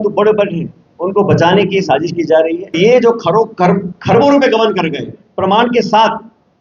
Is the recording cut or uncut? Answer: cut